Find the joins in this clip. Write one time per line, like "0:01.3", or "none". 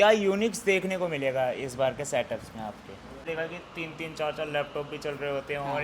0:03.2